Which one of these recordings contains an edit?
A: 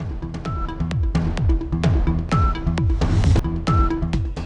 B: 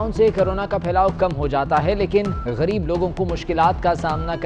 A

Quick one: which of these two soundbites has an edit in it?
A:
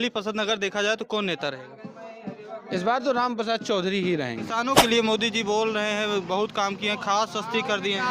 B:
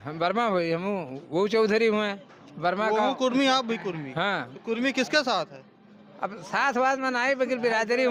A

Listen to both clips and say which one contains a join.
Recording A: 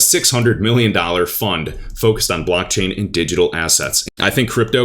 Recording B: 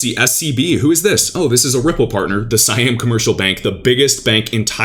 A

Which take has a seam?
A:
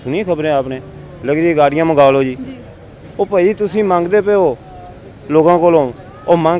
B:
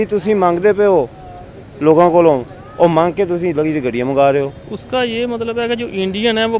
B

